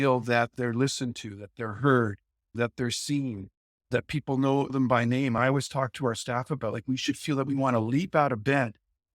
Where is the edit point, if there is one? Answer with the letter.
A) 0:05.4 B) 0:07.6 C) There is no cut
A